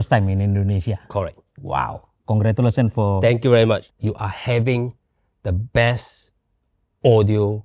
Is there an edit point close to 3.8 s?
yes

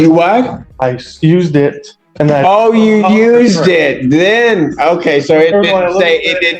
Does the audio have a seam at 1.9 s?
no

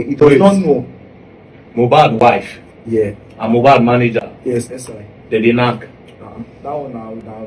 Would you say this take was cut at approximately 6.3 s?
no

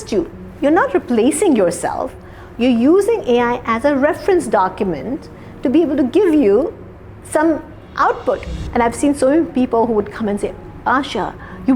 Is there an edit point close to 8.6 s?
yes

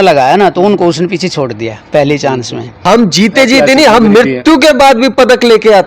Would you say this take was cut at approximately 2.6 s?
yes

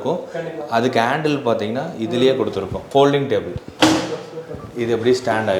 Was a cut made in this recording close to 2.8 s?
yes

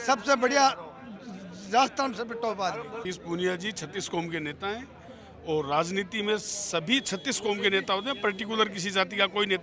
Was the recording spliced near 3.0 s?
yes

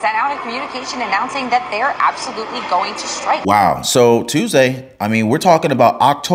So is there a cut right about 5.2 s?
no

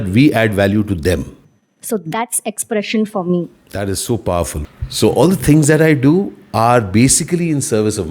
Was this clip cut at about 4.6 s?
yes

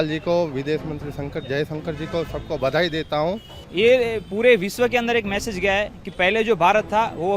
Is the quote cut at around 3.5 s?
yes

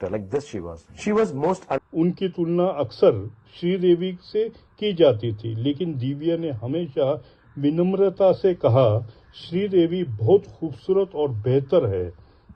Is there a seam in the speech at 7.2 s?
no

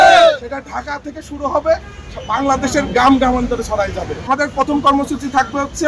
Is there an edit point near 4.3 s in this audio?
yes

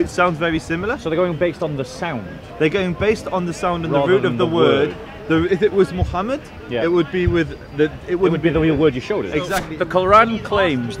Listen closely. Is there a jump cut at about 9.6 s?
yes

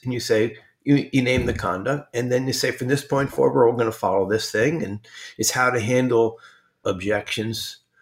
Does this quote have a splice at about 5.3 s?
no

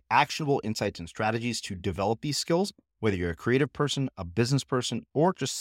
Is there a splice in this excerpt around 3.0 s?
no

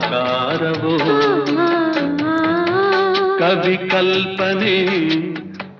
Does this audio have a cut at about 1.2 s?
no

